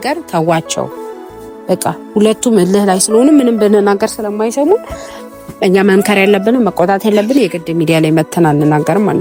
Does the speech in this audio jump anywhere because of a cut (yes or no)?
no